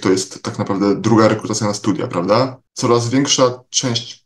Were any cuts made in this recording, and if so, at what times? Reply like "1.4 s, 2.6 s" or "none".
2.7 s